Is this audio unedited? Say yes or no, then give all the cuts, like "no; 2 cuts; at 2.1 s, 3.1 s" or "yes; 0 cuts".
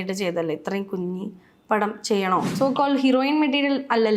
no; 1 cut; at 2.5 s